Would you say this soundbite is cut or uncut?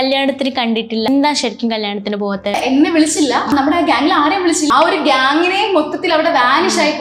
cut